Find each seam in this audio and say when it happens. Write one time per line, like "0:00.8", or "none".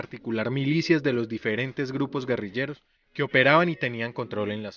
0:02.2